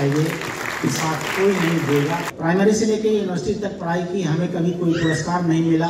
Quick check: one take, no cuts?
no; 1 cut; at 2.3 s

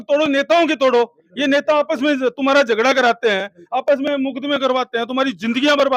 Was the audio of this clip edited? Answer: no; 0 cuts

